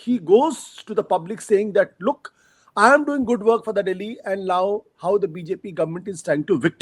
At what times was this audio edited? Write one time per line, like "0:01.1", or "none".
none